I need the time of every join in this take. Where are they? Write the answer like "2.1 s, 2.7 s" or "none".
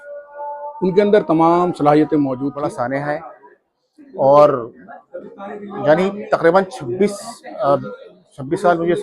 2.5 s